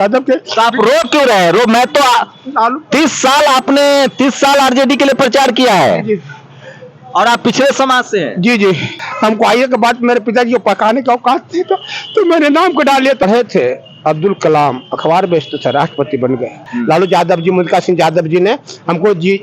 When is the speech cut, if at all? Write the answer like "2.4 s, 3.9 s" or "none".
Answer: 8.9 s, 13.2 s, 16.7 s